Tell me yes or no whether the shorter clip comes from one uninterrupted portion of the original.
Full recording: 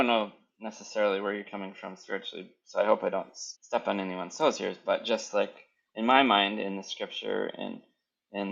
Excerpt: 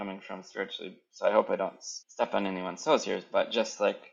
yes